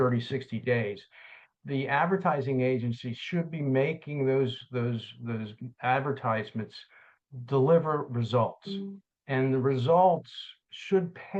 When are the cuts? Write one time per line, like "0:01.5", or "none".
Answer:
none